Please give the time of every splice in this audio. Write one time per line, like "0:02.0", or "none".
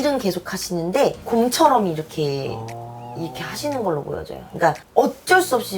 0:01.2
0:04.8